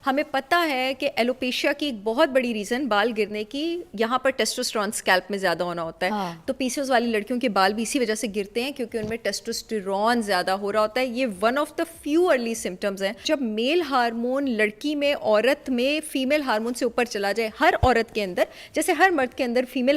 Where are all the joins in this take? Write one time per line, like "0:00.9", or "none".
0:13.2